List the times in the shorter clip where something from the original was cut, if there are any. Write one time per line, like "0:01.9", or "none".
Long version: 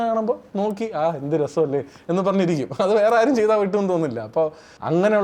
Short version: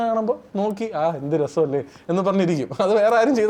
none